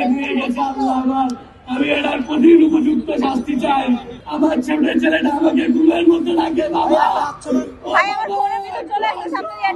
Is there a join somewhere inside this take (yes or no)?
yes